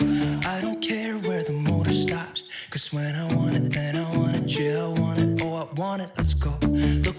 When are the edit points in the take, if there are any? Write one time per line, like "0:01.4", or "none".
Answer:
none